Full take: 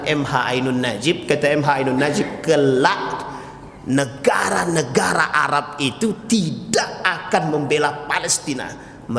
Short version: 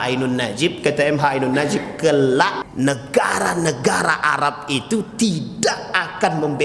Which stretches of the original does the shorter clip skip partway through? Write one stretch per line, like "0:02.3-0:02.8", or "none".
0:03.1-0:03.7